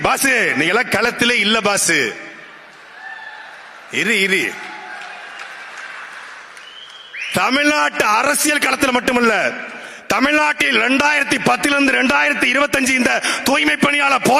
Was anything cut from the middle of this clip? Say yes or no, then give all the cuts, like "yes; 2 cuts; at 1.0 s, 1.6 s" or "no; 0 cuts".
no; 0 cuts